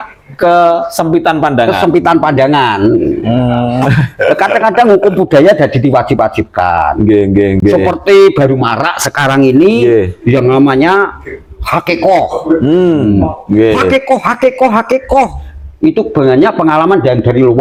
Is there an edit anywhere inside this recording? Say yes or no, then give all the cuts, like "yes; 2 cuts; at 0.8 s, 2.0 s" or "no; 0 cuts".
no; 0 cuts